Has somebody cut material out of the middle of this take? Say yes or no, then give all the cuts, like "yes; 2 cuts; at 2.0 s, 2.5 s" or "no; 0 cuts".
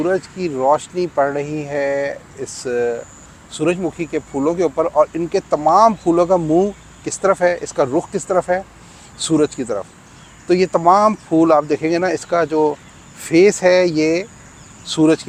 no; 0 cuts